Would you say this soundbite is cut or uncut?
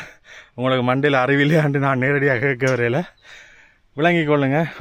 uncut